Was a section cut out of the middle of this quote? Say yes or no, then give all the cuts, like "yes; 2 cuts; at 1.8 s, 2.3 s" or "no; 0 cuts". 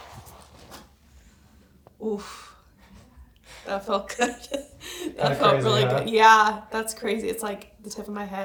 no; 0 cuts